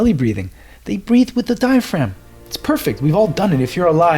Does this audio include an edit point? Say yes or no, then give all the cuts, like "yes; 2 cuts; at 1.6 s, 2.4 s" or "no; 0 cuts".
no; 0 cuts